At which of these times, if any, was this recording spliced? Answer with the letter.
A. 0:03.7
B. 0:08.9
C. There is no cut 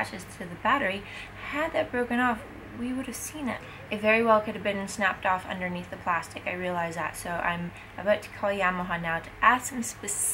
A